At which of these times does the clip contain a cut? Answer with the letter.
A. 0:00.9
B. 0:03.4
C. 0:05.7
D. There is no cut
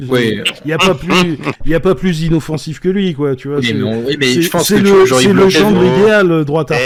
D